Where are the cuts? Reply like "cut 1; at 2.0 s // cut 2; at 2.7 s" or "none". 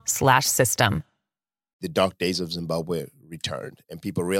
cut 1; at 1.8 s